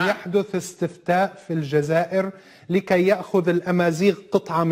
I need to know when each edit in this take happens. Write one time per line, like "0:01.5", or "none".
none